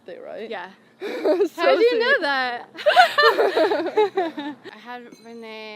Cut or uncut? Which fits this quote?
cut